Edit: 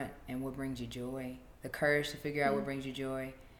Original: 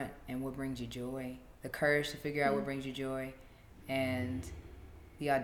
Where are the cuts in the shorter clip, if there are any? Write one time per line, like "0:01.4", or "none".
none